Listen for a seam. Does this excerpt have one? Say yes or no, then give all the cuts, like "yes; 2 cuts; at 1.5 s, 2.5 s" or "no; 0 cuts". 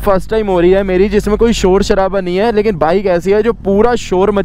no; 0 cuts